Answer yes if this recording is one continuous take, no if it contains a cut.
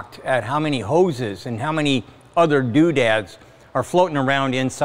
yes